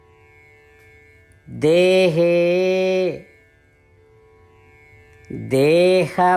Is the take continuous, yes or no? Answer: yes